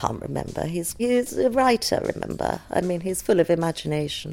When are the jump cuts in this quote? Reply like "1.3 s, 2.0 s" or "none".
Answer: 1.0 s